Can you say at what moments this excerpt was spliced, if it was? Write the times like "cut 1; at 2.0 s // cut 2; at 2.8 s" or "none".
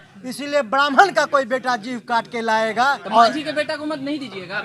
cut 1; at 3.0 s